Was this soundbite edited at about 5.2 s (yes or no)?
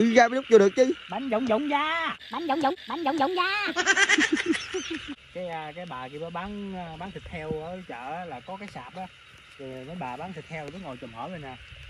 yes